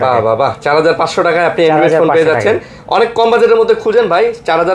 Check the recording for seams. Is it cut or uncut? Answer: uncut